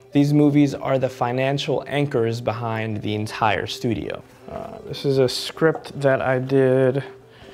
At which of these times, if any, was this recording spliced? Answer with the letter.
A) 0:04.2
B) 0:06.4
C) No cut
A